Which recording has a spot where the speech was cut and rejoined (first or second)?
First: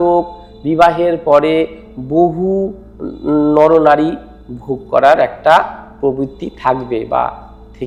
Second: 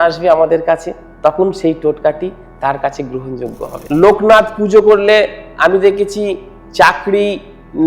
second